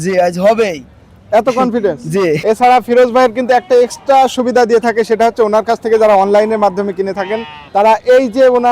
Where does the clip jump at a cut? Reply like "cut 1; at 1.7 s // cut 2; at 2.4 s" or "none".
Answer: cut 1; at 2.4 s